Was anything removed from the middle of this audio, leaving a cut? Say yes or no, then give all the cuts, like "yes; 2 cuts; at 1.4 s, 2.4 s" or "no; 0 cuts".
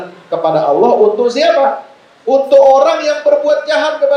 no; 0 cuts